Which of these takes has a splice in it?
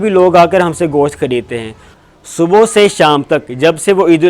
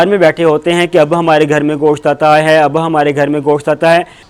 first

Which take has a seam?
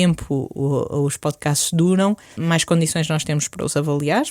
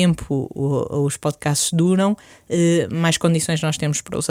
first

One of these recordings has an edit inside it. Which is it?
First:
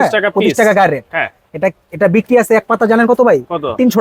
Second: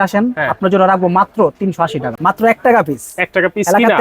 second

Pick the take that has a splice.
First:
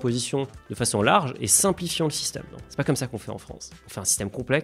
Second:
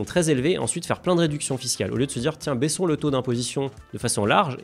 first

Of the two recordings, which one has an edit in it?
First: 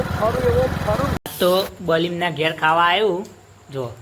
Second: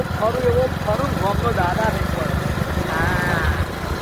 first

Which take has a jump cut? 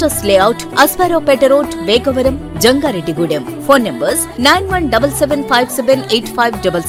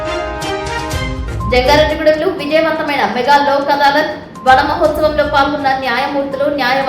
second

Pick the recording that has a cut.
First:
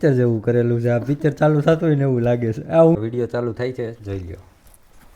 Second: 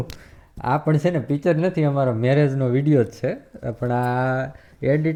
first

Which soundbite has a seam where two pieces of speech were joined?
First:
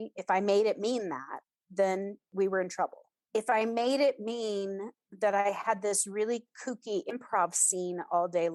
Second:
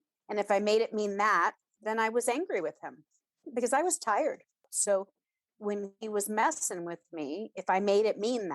second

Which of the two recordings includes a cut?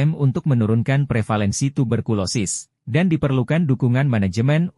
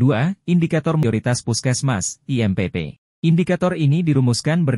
second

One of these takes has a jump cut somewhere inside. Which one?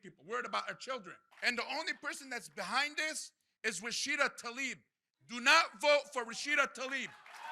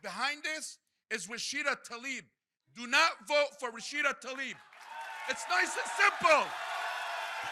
first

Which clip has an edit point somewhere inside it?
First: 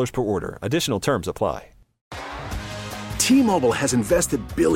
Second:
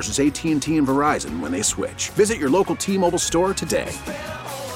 first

